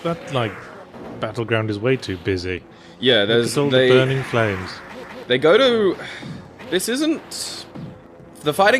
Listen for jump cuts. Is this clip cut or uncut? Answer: cut